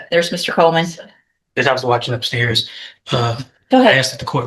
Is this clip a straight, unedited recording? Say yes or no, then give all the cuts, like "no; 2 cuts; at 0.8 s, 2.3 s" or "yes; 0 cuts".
yes; 0 cuts